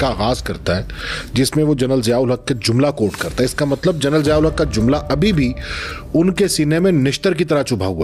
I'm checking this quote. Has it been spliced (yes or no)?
no